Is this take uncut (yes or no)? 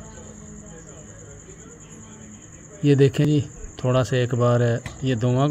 no